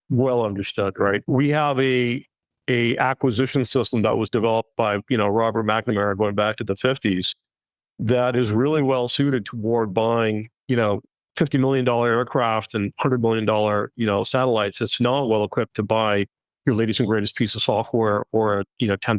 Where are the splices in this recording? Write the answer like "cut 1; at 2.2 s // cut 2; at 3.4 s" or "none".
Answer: none